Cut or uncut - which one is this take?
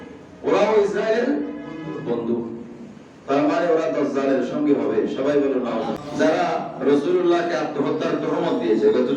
cut